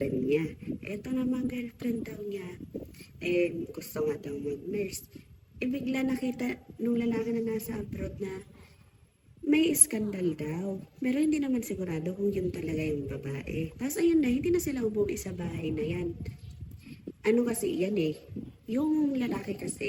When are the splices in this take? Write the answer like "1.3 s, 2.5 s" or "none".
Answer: none